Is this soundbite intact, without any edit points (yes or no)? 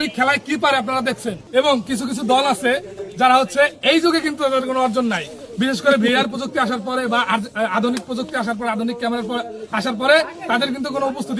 no